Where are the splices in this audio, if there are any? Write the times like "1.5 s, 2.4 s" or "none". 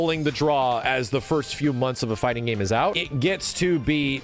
3.0 s